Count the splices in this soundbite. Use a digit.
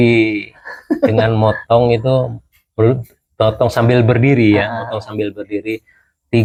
0